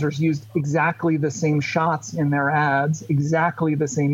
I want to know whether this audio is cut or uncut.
uncut